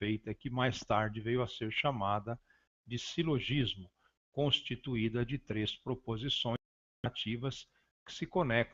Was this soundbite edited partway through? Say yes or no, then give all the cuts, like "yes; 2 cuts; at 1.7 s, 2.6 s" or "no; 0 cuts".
no; 0 cuts